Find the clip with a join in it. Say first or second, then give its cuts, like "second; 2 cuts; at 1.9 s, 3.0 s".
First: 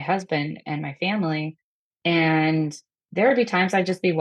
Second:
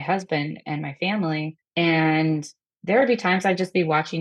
second; 1 cut; at 1.6 s